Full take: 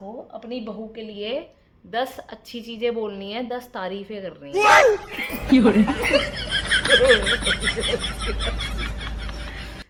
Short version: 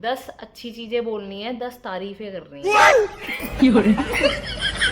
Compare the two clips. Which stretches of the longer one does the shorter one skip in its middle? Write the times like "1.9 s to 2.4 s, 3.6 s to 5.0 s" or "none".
none

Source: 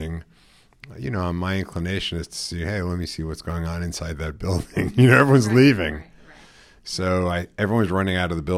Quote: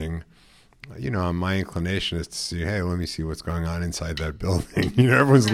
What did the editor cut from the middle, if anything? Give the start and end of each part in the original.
none

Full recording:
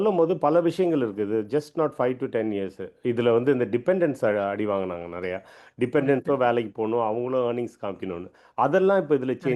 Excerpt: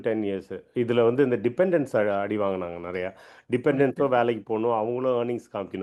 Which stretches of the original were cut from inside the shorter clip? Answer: none

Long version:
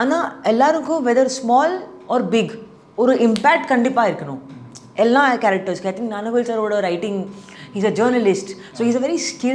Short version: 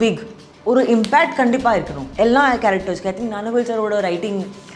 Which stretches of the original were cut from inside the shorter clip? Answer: 4.3 s to 4.8 s

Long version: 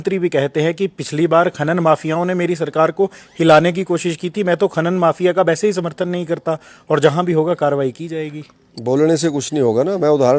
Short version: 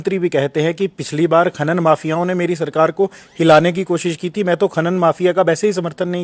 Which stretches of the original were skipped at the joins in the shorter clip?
none

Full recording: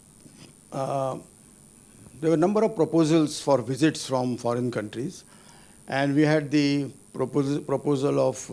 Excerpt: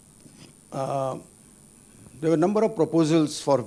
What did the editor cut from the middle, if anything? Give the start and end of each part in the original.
none

